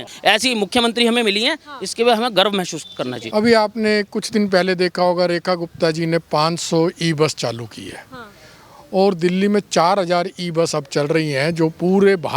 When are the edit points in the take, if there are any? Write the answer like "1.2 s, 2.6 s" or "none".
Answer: 3.2 s